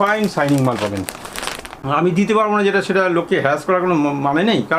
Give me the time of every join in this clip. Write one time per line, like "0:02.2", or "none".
0:01.7